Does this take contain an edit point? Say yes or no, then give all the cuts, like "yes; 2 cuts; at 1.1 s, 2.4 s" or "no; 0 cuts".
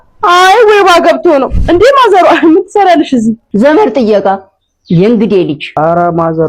no; 0 cuts